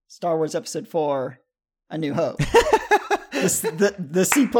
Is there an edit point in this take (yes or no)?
no